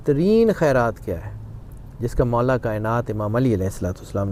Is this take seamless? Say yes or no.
yes